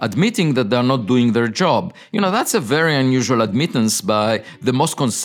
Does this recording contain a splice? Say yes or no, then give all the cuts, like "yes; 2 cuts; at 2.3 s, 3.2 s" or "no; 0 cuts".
no; 0 cuts